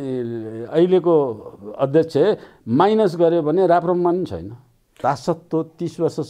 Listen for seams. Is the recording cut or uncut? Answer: cut